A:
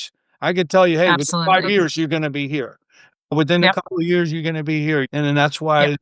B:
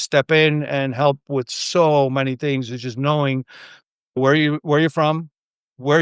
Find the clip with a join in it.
A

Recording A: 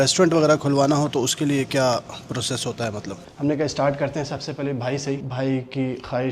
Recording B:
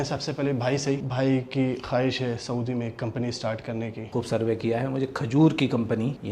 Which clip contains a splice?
A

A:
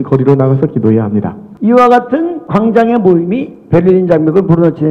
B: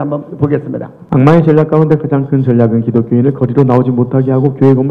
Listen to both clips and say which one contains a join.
A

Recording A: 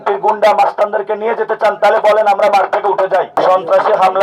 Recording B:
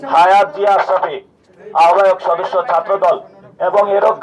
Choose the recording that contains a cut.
A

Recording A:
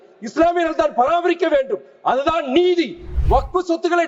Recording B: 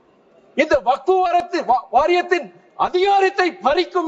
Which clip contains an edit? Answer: A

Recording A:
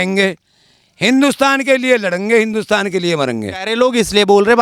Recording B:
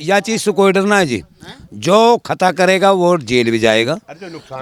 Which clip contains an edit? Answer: A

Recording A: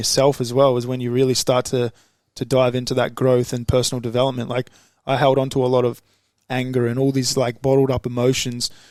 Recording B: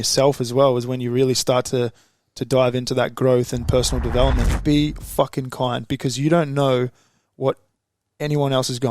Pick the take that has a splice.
B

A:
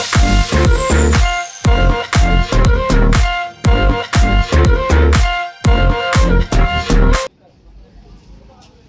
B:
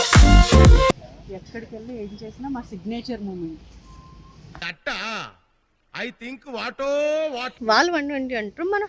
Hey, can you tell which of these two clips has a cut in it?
B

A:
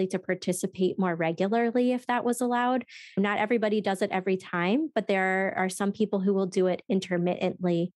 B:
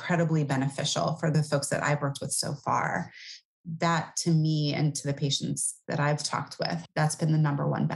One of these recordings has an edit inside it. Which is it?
B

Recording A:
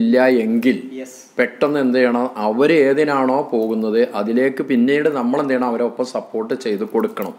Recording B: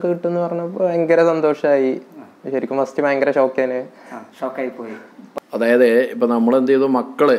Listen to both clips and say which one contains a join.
B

